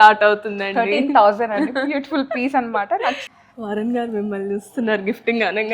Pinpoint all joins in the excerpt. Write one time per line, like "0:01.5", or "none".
0:03.2